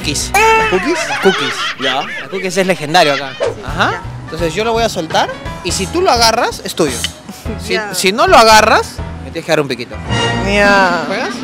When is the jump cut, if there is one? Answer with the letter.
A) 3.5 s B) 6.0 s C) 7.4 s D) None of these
A